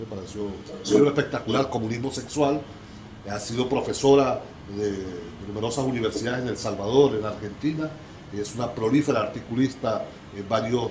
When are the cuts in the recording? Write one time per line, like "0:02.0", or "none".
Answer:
0:04.4